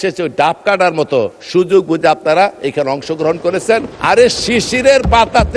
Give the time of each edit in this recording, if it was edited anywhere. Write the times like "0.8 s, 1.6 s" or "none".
2.6 s, 3.9 s